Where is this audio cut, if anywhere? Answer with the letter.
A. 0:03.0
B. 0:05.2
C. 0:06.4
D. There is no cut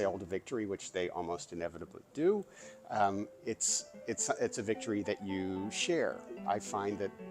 C